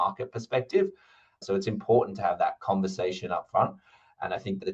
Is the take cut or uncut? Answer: cut